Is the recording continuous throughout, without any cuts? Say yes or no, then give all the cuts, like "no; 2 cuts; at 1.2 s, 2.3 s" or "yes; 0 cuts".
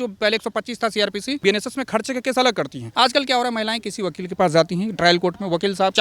no; 1 cut; at 2.8 s